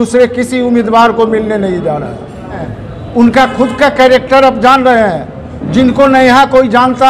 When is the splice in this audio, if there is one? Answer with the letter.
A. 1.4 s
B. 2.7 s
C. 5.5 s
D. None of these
B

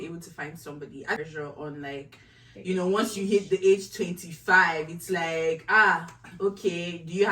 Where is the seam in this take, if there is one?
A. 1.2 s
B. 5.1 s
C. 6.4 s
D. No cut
A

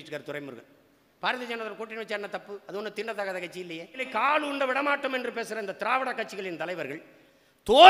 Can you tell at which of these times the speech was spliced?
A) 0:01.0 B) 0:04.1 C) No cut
B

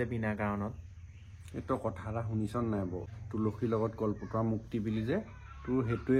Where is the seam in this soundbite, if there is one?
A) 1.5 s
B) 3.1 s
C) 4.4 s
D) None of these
B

